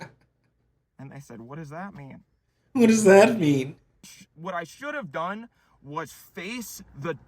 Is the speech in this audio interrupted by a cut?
yes; 1 cut; at 4.2 s

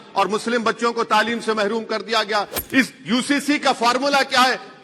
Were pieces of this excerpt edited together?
yes; 1 cut; at 2.6 s

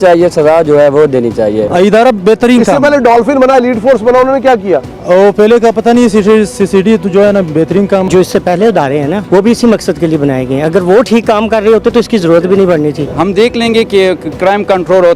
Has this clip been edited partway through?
yes; 4 cuts; at 1.6 s, 8.1 s, 9.2 s, 13.1 s

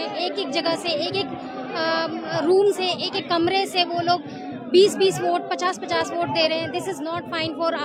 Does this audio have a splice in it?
no; 0 cuts

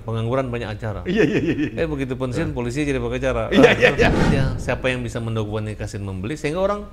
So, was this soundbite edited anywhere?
yes; 1 cut; at 4.2 s

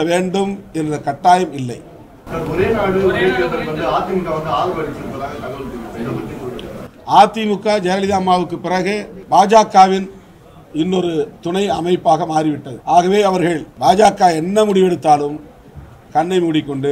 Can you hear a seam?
yes; 3 cuts; at 9.1 s, 12.7 s, 13.7 s

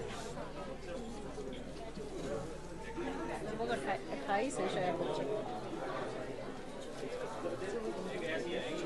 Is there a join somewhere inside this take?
no; 0 cuts

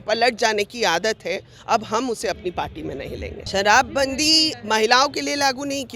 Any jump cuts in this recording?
yes; 1 cut; at 3.4 s

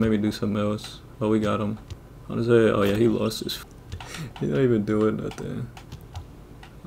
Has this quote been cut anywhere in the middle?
yes; 1 cut; at 3.5 s

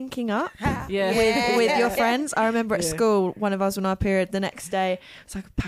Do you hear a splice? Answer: no; 0 cuts

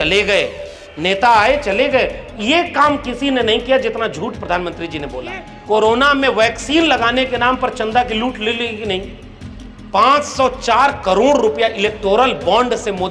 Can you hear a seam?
yes; 1 cut; at 5.5 s

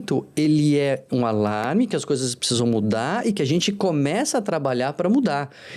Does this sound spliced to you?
no; 0 cuts

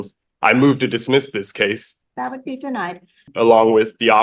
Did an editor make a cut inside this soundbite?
yes; 2 cuts; at 1.9 s, 3.3 s

